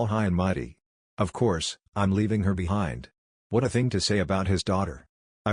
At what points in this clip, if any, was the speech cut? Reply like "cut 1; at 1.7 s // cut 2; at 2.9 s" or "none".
none